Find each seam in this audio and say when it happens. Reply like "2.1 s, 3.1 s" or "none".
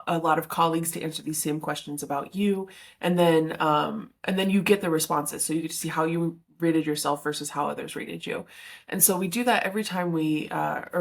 none